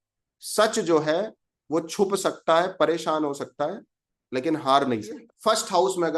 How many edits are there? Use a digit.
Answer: 1